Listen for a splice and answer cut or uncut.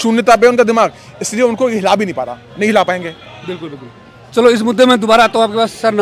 uncut